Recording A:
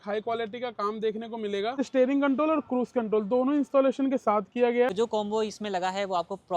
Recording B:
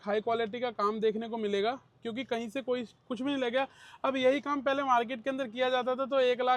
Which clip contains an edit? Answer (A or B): A